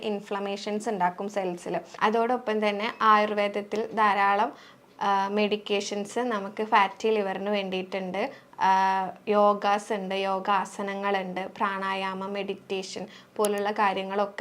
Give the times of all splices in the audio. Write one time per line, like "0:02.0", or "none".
0:01.9